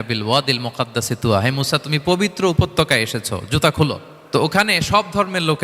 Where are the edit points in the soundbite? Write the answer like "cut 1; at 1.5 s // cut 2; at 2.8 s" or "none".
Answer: cut 1; at 4.1 s